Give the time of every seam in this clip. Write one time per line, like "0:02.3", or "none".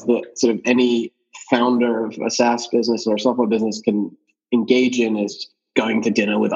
0:01.2
0:04.3
0:05.5